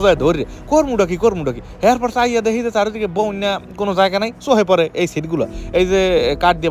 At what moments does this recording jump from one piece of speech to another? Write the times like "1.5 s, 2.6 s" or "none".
none